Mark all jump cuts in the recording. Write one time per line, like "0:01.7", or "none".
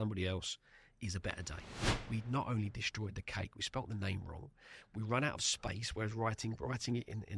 0:01.7